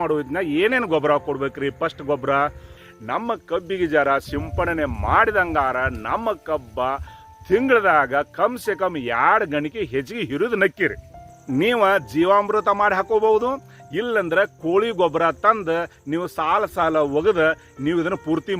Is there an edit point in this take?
yes; 2 cuts; at 2.9 s, 11.4 s

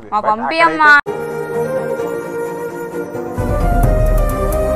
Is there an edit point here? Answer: no; 0 cuts

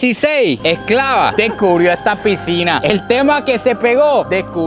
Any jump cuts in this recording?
no; 0 cuts

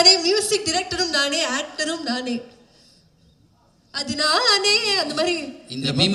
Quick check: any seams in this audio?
no; 0 cuts

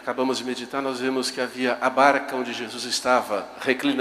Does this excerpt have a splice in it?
yes; 1 cut; at 1.9 s

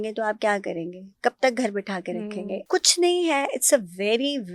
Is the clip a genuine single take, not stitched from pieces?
no; 1 cut; at 2.6 s

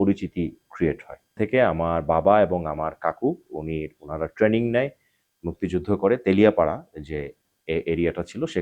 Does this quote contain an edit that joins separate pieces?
yes; 1 cut; at 1.3 s

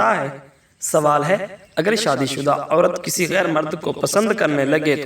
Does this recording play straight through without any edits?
yes; 0 cuts

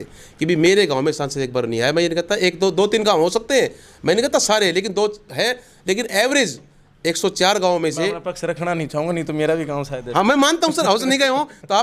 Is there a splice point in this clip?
no; 0 cuts

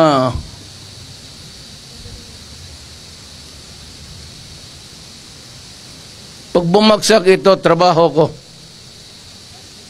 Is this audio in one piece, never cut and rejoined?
yes; 0 cuts

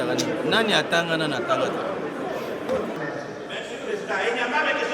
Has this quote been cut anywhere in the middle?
yes; 1 cut; at 3.0 s

